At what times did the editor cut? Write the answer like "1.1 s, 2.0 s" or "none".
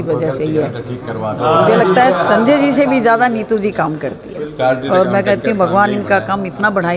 none